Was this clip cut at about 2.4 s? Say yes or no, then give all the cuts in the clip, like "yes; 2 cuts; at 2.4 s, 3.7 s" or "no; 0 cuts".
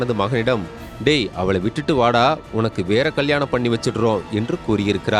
no; 0 cuts